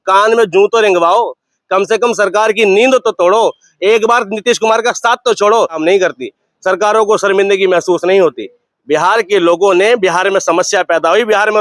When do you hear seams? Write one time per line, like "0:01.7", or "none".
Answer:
0:05.8